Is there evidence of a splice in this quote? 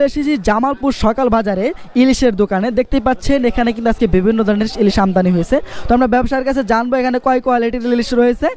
no; 0 cuts

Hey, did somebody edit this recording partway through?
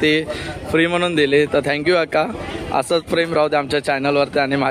no; 0 cuts

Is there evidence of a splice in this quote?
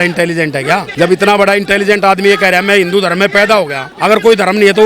yes; 2 cuts; at 0.9 s, 3.8 s

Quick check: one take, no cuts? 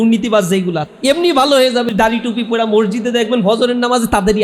no; 2 cuts; at 0.8 s, 1.9 s

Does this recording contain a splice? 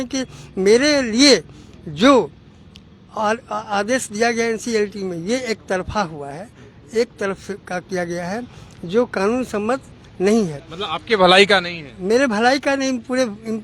no; 0 cuts

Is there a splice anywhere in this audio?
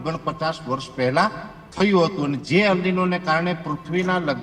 yes; 1 cut; at 2.4 s

